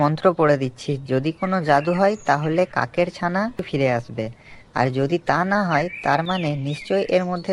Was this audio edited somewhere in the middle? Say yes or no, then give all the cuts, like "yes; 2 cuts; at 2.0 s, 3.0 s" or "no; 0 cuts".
yes; 1 cut; at 3.7 s